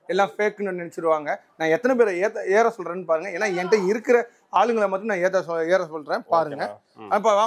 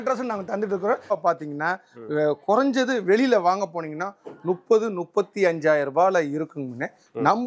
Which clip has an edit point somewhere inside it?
second; 1 cut; at 1.1 s

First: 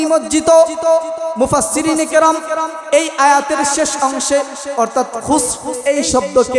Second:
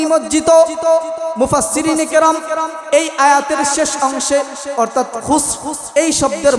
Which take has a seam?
first; 1 cut; at 5.7 s

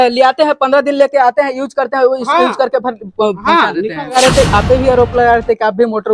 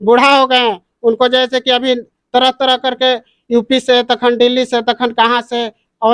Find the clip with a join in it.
first; 1 cut; at 4.2 s

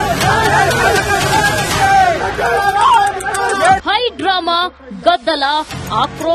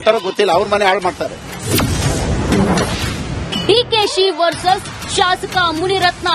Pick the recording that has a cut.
second; 1 cut; at 1.0 s

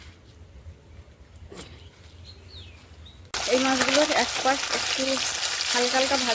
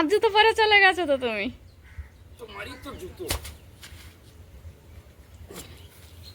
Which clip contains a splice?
first; 1 cut; at 3.3 s

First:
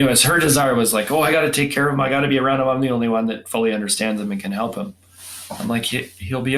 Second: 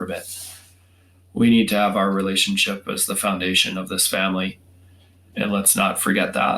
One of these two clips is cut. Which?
second; 1 cut; at 5.2 s

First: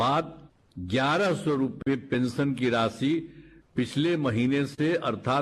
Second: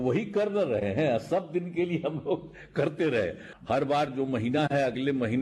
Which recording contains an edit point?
second; 1 cut; at 3.5 s

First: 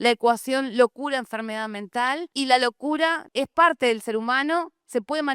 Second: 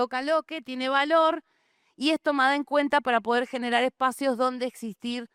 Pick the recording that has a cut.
first; 2 cuts; at 2.3 s, 3.2 s

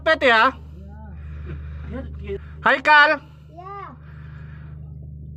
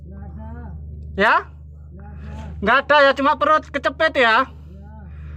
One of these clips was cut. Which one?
first; 1 cut; at 2.4 s

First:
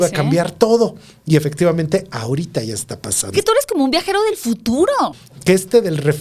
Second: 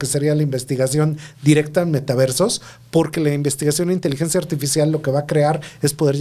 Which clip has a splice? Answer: first; 2 cuts; at 3.2 s, 5.3 s

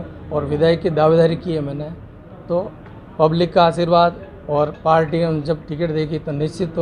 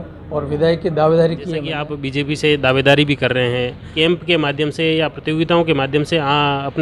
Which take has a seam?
second; 2 cuts; at 1.9 s, 4.0 s

